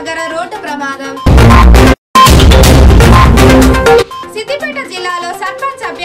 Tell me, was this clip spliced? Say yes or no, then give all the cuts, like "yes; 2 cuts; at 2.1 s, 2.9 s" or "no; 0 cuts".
yes; 2 cuts; at 1.9 s, 4.2 s